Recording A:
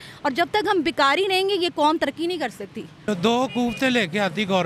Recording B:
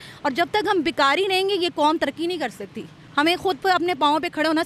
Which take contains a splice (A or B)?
A